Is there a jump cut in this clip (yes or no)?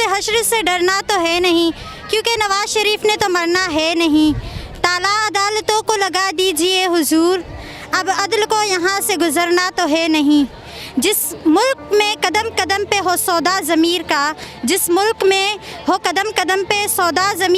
no